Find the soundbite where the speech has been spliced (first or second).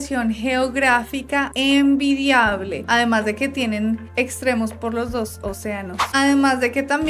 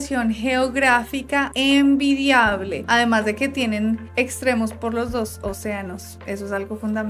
first